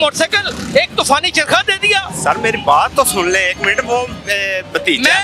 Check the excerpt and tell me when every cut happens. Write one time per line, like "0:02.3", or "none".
none